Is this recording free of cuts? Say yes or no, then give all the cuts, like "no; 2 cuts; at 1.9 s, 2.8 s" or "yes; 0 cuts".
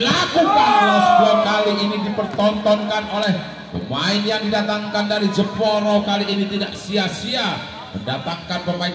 yes; 0 cuts